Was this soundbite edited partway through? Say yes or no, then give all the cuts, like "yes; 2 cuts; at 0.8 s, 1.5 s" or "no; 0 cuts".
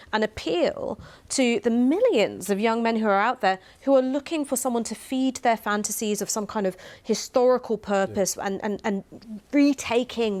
no; 0 cuts